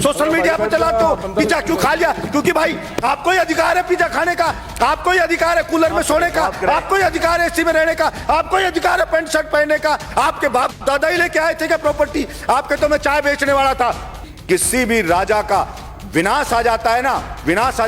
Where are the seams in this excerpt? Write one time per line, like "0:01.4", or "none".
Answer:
0:14.3